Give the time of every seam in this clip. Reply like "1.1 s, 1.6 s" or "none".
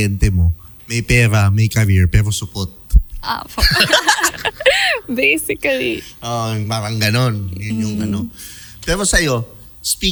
none